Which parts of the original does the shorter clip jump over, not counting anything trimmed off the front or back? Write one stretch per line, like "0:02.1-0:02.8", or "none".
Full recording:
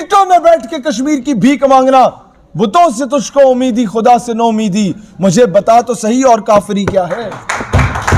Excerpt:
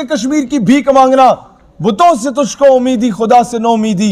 none

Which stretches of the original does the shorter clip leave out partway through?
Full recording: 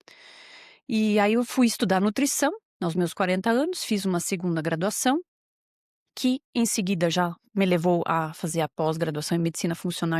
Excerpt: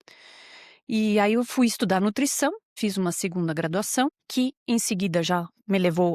0:02.7-0:03.8
0:05.3-0:06.1

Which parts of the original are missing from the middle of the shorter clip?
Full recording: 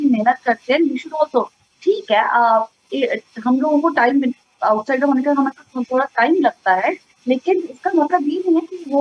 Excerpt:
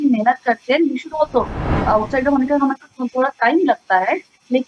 0:01.7-0:04.4

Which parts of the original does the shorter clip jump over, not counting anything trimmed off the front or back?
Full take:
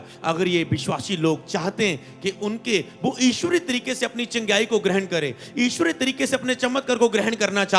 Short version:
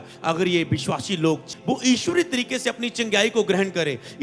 0:01.5-0:02.8

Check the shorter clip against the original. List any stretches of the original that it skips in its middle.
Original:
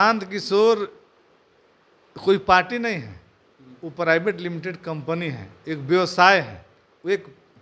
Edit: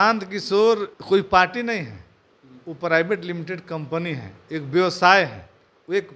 0:00.9-0:02.1

